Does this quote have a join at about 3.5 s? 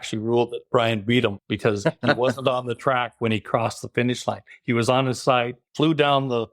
no; 2 cuts; at 1.5 s, 5.6 s

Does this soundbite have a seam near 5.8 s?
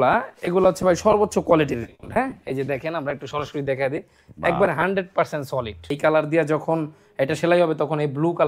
yes; 1 cut; at 5.8 s

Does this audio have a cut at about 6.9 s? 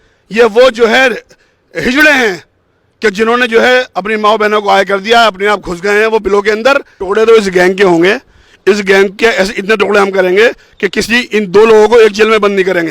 yes; 1 cut; at 6.9 s

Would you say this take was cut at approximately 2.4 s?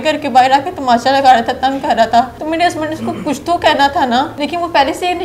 yes; 2 cuts; at 2.4 s, 4.3 s

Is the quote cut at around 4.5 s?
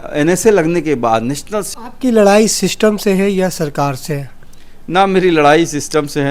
no; 1 cut; at 1.7 s

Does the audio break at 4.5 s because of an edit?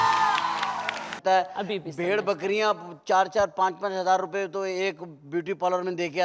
no; 1 cut; at 1.1 s

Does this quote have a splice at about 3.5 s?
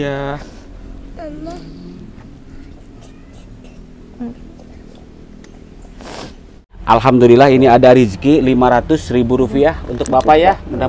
no; 1 cut; at 6.7 s

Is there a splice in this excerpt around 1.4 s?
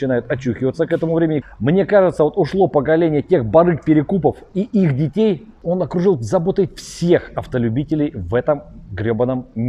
yes; 2 cuts; at 1.4 s, 5.6 s

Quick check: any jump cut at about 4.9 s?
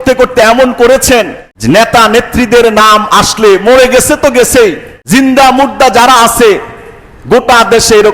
yes; 2 cuts; at 1.4 s, 4.9 s

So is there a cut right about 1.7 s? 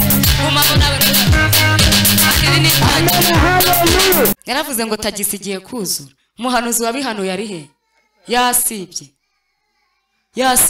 no; 1 cut; at 4.3 s

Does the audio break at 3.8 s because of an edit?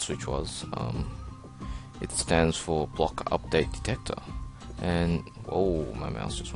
yes; 1 cut; at 3.8 s

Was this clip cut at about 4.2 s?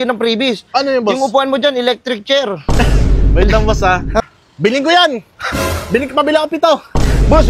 yes; 1 cut; at 4.2 s

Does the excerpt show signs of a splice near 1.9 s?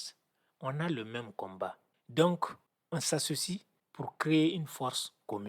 yes; 1 cut; at 1.9 s

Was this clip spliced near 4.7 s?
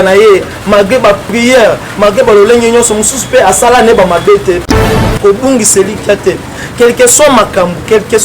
yes; 1 cut; at 4.7 s

